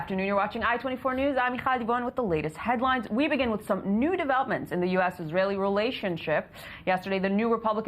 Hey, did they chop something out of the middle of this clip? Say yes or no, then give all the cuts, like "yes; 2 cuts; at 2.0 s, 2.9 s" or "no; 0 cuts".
no; 0 cuts